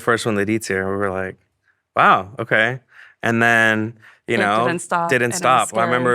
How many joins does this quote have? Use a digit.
0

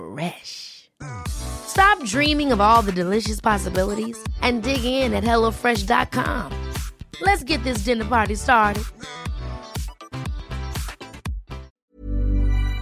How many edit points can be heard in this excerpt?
1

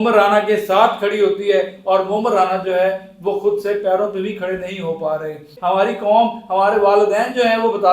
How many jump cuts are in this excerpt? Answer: 1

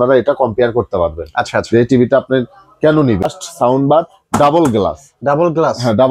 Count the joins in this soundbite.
1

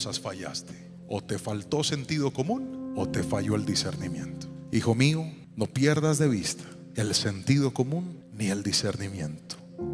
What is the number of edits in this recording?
1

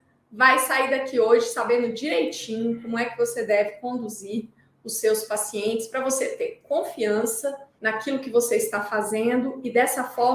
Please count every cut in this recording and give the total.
1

